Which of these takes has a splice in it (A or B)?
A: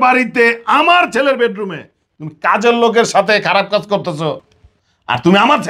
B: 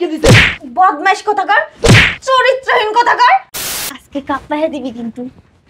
B